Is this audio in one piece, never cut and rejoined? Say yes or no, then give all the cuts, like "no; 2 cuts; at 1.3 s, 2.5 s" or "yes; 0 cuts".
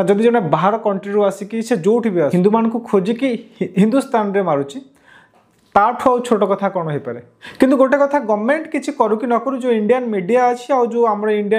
no; 2 cuts; at 2.3 s, 7.4 s